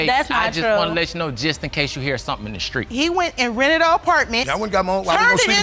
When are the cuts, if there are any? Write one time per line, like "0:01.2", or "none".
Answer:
0:02.9